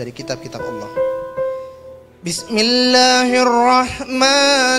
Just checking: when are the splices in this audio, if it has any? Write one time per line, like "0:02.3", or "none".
0:01.7